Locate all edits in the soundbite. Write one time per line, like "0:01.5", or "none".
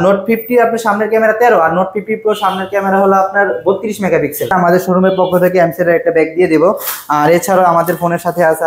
0:04.5